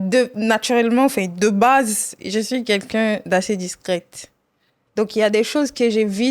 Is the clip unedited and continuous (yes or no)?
yes